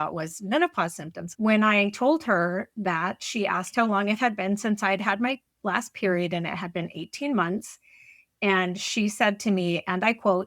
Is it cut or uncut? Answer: cut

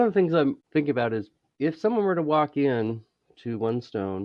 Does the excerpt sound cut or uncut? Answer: cut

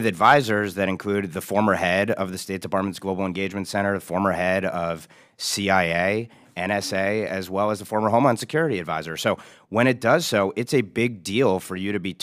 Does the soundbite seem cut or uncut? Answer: uncut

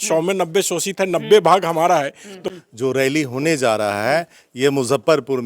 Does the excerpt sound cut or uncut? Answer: cut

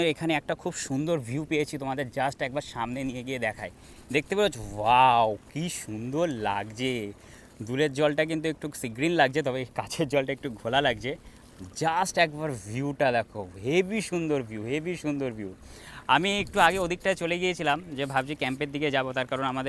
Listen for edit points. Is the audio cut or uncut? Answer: uncut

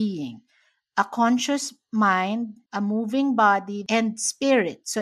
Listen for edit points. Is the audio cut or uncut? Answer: cut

